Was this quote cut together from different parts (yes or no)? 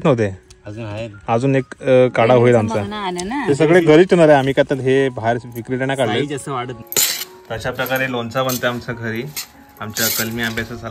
yes